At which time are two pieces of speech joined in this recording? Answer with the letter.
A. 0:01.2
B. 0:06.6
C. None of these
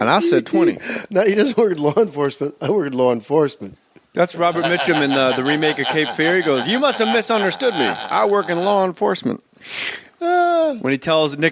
C